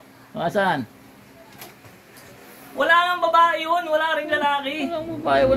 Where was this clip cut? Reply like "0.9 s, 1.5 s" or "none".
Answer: none